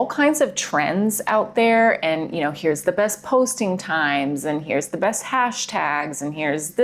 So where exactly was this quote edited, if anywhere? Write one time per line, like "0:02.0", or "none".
none